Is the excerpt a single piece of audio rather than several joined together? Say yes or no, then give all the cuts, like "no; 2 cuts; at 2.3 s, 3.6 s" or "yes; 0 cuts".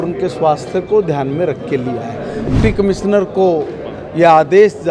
no; 1 cut; at 2.5 s